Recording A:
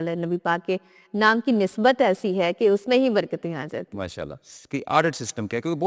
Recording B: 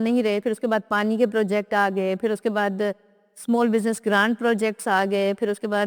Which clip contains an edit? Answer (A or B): A